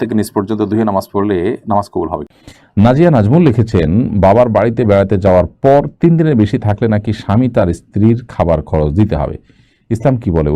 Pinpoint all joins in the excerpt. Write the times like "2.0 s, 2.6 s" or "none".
2.3 s